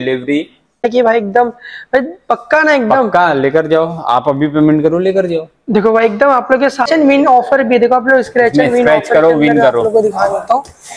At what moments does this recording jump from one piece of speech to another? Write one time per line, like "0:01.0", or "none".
0:00.9
0:06.9